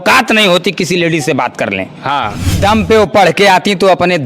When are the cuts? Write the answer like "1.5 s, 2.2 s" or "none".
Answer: 2.6 s